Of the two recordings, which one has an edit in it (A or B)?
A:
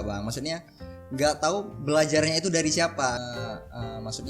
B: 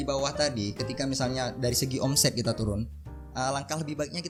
A